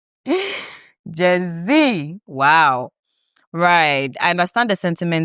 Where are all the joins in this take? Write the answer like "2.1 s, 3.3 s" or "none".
none

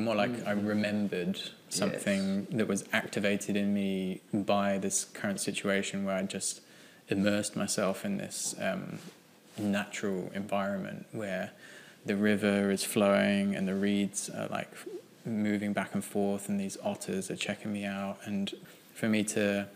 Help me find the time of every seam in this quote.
18.6 s

